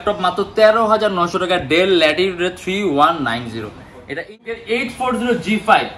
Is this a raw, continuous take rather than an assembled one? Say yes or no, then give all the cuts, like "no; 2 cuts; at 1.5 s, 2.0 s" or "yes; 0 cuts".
no; 1 cut; at 4.4 s